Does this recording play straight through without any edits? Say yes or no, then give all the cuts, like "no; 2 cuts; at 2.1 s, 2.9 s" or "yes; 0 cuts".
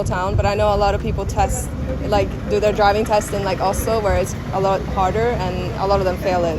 yes; 0 cuts